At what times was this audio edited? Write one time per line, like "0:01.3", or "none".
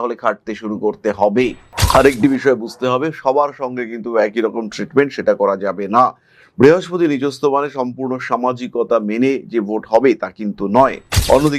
0:01.7